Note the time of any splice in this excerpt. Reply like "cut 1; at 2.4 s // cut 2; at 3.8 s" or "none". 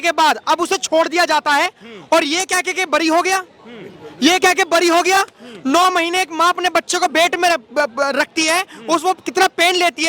none